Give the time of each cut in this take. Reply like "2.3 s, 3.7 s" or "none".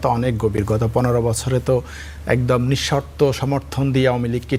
none

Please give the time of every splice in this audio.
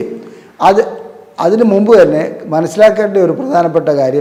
none

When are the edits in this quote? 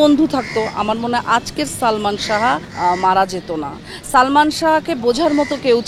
2.7 s

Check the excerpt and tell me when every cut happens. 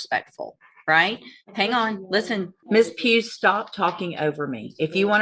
2.6 s

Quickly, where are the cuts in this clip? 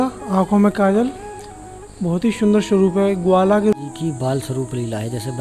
3.7 s

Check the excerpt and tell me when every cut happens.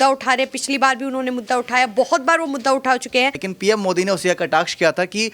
3.4 s

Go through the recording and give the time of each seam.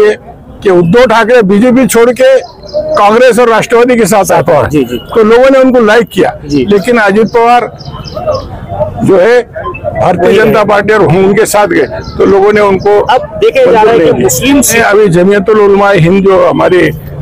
14.8 s

